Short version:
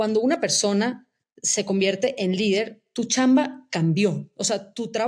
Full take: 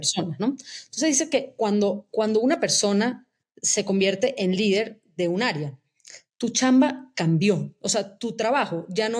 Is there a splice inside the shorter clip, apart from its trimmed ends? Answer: yes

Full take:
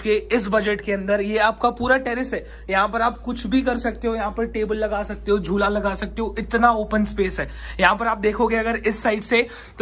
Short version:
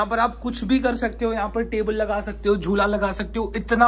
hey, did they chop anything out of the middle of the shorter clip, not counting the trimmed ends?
no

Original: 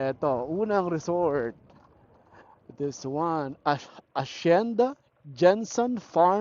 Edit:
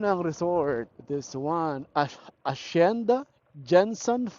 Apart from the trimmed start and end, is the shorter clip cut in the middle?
yes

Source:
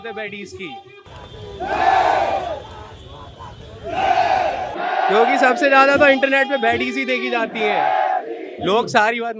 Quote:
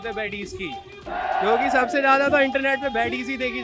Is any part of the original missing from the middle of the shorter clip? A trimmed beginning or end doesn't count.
yes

